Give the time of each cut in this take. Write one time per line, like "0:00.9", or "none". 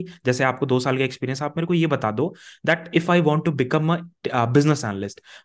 none